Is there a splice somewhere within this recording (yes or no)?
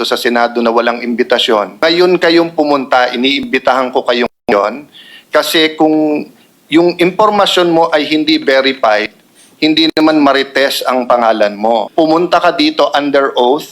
yes